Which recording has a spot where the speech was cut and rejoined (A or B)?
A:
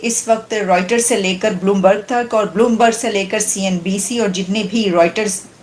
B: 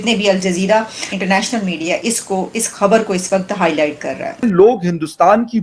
B